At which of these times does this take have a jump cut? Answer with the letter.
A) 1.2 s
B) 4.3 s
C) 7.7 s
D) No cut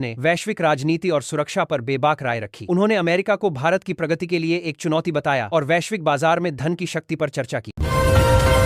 D